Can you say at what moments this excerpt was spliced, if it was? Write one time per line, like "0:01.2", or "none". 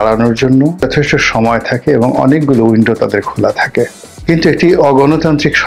0:00.9
0:04.1